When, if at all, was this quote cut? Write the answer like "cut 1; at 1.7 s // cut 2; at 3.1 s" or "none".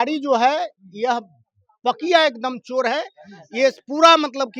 none

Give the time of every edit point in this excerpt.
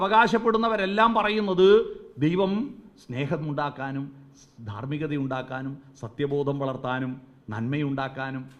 none

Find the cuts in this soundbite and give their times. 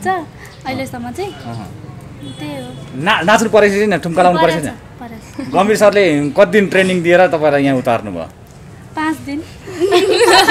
none

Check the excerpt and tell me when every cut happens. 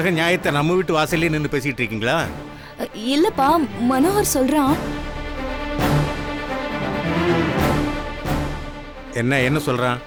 none

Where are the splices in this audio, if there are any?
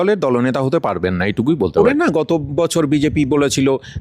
cut 1; at 2.1 s

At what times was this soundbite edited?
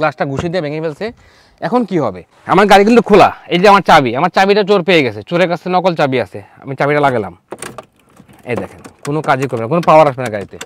cut 1; at 2.3 s

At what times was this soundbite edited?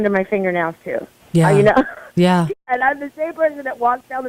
cut 1; at 2.5 s

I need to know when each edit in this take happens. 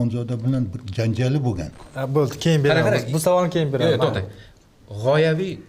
cut 1; at 1.9 s

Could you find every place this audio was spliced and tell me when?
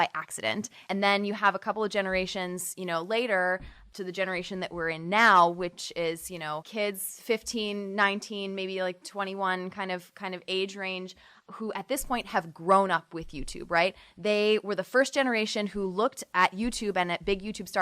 cut 1; at 0.9 s // cut 2; at 3.9 s // cut 3; at 6.7 s // cut 4; at 11.3 s // cut 5; at 16.2 s

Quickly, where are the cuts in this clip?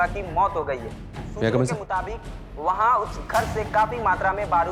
none

